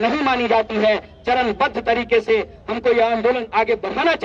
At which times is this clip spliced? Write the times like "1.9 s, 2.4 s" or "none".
none